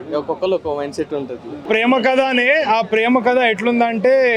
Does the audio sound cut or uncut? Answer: cut